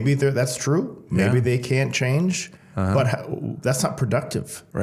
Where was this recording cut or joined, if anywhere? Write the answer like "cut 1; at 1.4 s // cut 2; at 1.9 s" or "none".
none